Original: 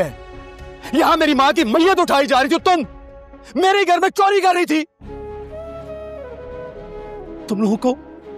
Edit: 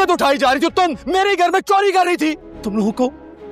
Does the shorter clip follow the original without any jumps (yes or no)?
no